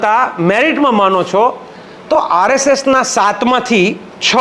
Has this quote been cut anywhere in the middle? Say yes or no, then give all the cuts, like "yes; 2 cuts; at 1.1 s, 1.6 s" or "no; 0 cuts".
no; 0 cuts